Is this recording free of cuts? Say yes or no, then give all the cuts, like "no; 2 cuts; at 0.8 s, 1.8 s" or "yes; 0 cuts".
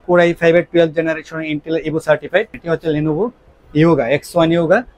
no; 1 cut; at 2.6 s